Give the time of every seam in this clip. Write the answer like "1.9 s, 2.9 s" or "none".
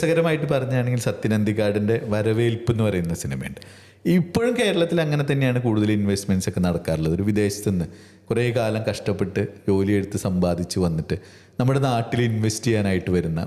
none